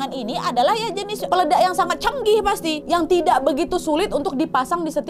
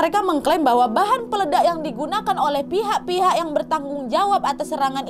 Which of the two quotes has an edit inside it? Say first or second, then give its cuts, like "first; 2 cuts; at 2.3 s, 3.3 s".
first; 2 cuts; at 1.2 s, 2.8 s